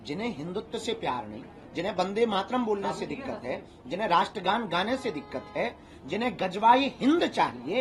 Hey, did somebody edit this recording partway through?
no; 0 cuts

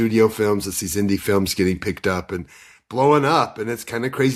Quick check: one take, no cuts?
yes; 0 cuts

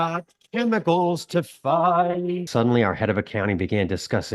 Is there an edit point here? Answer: yes; 1 cut; at 2.5 s

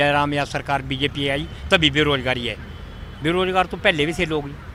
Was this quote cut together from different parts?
no; 0 cuts

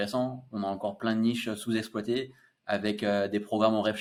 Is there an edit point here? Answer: no; 0 cuts

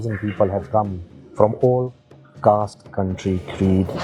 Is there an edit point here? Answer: no; 0 cuts

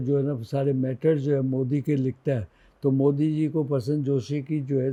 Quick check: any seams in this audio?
no; 0 cuts

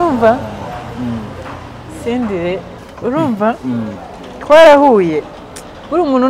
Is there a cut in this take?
yes; 1 cut; at 2.8 s

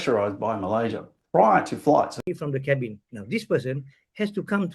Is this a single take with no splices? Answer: no; 1 cut; at 2.2 s

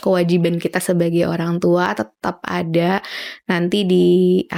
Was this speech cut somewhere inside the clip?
no; 0 cuts

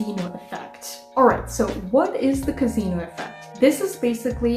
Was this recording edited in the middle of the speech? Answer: no; 0 cuts

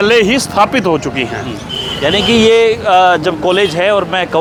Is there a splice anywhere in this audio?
no; 0 cuts

